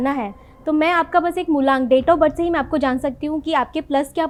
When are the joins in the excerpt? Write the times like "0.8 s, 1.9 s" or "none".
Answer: none